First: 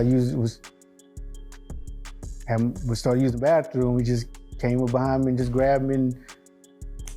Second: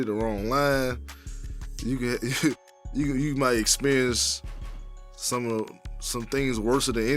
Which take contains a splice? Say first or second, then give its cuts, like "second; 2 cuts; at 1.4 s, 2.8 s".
first; 1 cut; at 6.3 s